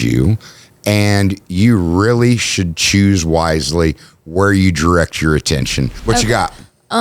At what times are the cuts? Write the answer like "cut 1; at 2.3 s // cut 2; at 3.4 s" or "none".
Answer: cut 1; at 5.9 s